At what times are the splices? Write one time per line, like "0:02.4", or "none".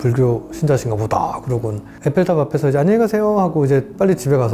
0:01.8